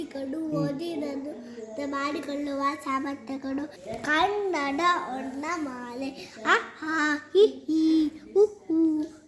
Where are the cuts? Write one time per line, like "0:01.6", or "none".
0:03.8